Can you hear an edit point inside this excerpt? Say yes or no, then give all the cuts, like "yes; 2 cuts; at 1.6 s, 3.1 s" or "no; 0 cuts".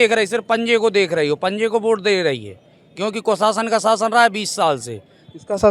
no; 0 cuts